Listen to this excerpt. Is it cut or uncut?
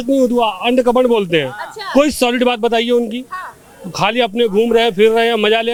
uncut